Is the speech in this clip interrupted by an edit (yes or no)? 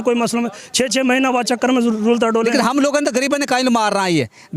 yes